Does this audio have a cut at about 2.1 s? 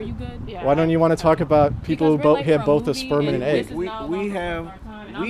no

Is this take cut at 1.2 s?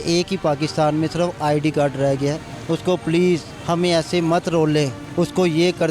no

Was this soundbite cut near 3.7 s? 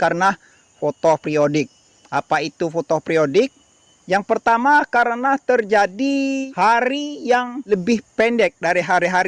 no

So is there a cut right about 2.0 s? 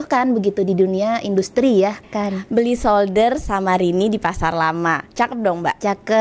yes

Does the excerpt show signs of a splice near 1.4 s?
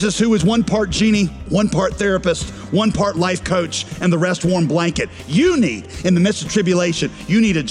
yes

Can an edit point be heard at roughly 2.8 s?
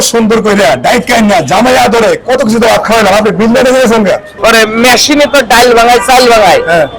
no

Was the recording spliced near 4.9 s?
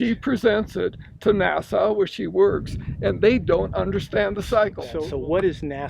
yes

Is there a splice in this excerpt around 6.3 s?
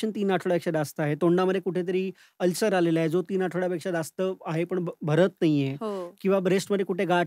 no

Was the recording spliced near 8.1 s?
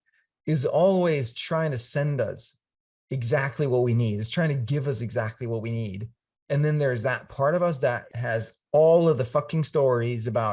yes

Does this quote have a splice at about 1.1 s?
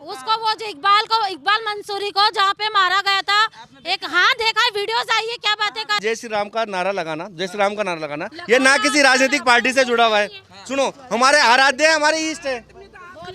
no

